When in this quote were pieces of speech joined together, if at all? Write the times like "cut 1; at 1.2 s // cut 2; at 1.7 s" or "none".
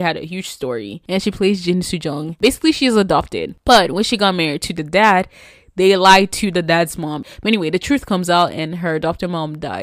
cut 1; at 0.9 s // cut 2; at 2.3 s // cut 3; at 7.3 s